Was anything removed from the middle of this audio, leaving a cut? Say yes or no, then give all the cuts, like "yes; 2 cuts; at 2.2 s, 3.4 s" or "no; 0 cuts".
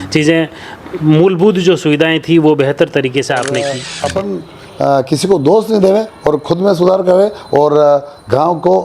yes; 1 cut; at 3.9 s